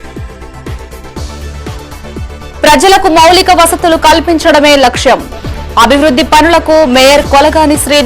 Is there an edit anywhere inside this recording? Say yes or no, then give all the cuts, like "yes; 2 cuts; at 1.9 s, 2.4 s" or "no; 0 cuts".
yes; 1 cut; at 2.1 s